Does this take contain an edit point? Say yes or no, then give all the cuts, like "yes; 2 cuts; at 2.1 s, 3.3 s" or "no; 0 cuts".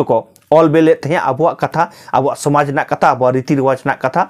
no; 0 cuts